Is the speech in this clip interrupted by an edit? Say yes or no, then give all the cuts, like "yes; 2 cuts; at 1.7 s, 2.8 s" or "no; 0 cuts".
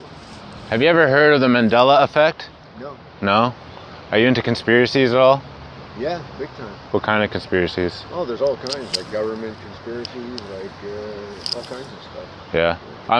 no; 0 cuts